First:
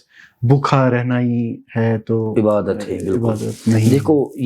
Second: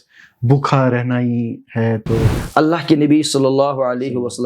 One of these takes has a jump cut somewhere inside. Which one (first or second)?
second